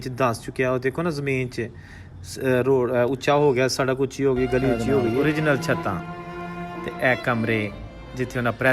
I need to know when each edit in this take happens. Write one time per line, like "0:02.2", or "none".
0:05.2